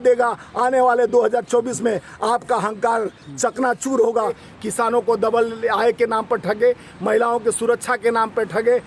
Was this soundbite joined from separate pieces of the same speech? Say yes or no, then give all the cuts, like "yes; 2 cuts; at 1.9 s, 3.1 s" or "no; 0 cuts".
yes; 1 cut; at 4.4 s